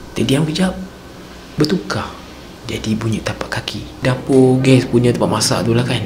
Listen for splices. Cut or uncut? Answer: cut